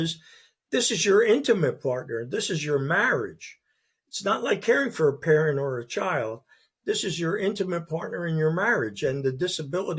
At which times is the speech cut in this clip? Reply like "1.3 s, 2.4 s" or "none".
none